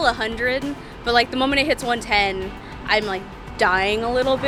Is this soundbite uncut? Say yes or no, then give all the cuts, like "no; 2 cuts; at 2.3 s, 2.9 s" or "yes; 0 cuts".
yes; 0 cuts